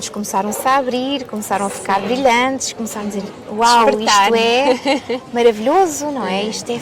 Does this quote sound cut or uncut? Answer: uncut